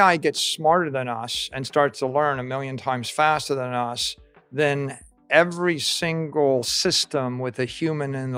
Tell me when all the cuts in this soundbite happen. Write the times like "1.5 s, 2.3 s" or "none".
none